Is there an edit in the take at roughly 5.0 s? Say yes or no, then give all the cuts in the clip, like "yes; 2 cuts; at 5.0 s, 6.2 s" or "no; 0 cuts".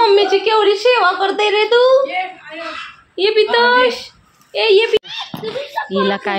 yes; 1 cut; at 5.0 s